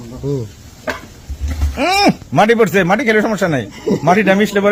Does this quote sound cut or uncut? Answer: uncut